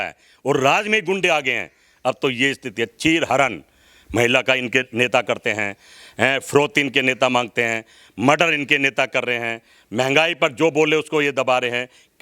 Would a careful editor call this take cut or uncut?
uncut